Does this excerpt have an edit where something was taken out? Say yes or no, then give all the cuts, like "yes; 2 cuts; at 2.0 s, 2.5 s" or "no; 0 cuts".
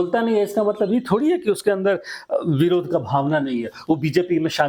no; 0 cuts